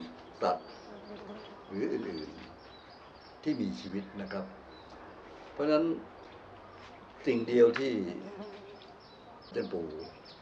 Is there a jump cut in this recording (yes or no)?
yes